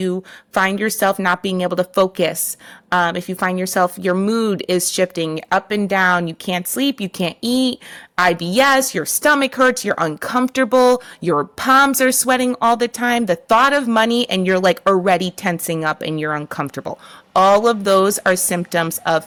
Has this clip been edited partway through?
no; 0 cuts

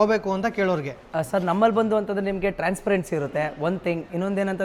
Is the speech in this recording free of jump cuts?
yes; 0 cuts

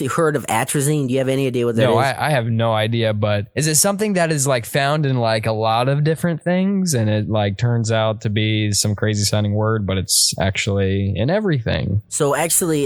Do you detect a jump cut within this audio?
no; 0 cuts

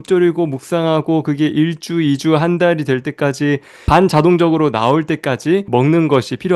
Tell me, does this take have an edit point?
yes; 1 cut; at 5.7 s

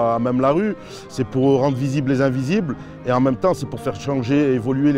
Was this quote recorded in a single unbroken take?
yes; 0 cuts

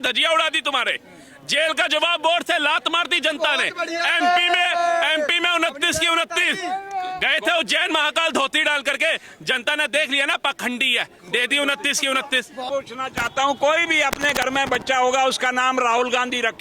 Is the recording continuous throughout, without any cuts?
no; 1 cut; at 12.7 s

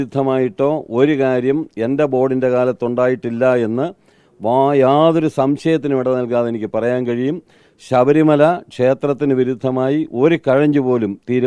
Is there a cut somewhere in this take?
no; 0 cuts

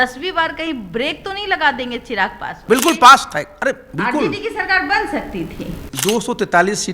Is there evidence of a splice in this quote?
yes; 2 cuts; at 2.5 s, 5.8 s

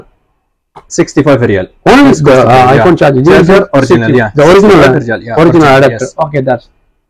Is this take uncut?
yes; 0 cuts

